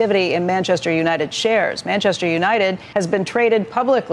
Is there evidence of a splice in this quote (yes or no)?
yes